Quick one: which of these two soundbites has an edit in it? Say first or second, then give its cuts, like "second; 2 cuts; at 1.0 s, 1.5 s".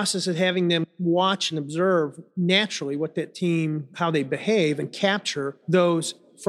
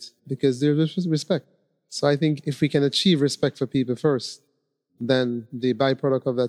first; 4 cuts; at 0.9 s, 2.2 s, 3.9 s, 5.5 s